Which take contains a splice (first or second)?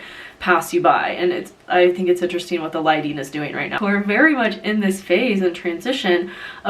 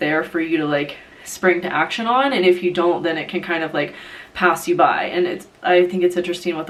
first